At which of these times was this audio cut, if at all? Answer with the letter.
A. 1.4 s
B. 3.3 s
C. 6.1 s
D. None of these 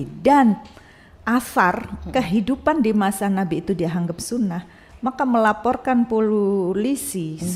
D